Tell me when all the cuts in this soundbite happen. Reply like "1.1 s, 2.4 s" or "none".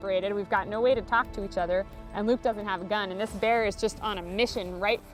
none